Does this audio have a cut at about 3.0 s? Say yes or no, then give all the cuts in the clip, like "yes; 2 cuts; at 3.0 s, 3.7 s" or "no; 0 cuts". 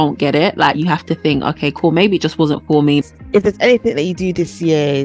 yes; 1 cut; at 3.0 s